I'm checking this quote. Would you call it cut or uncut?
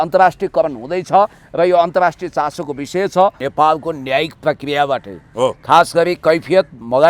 cut